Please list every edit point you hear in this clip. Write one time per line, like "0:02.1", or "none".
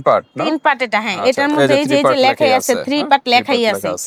none